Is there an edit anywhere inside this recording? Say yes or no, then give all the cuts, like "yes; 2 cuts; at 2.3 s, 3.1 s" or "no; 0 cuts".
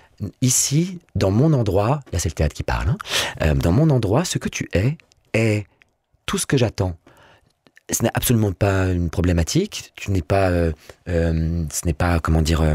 no; 0 cuts